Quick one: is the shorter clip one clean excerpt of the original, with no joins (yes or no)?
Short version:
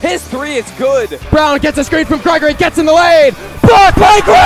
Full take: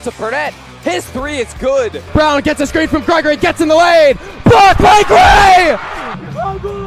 yes